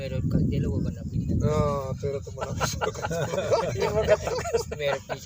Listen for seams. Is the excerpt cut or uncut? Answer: uncut